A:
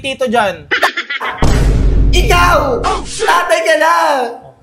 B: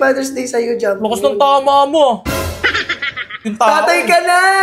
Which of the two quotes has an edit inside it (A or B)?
B